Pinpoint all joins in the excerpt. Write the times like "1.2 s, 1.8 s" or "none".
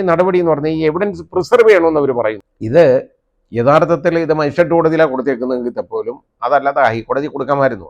2.5 s